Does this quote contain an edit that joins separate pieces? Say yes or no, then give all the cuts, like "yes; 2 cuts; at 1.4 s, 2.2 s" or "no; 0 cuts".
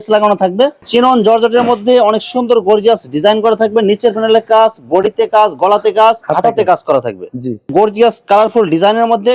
yes; 2 cuts; at 0.8 s, 7.6 s